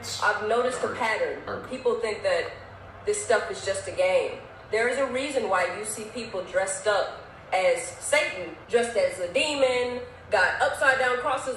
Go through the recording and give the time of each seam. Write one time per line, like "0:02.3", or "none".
0:01.4
0:08.5